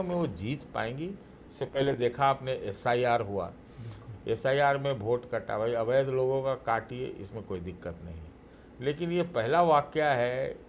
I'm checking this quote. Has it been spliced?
no; 0 cuts

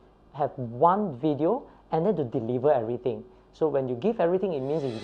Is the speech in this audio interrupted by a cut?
no; 0 cuts

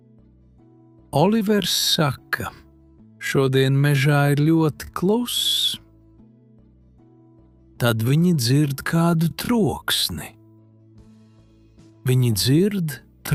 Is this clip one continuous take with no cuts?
yes; 0 cuts

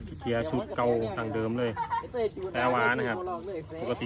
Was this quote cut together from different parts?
no; 0 cuts

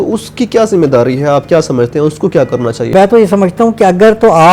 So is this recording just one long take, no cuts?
no; 1 cut; at 2.9 s

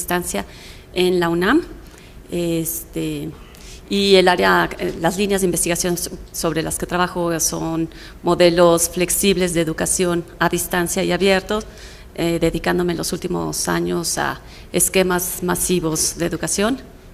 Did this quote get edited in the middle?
no; 0 cuts

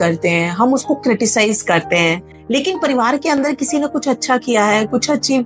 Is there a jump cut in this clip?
no; 0 cuts

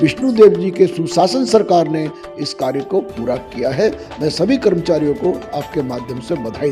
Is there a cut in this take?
no; 0 cuts

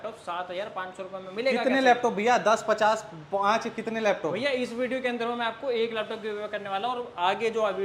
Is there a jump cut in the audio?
no; 0 cuts

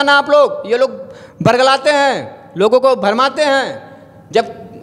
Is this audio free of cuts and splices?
yes; 0 cuts

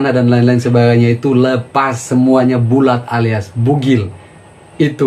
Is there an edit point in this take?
no; 0 cuts

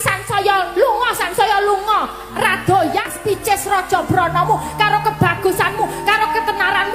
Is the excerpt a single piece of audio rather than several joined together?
no; 1 cut; at 3.1 s

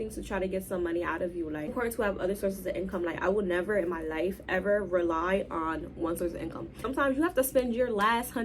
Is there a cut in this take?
yes; 2 cuts; at 1.7 s, 6.8 s

